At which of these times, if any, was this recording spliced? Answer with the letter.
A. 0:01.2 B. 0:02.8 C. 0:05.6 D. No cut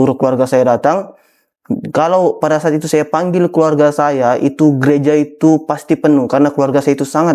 D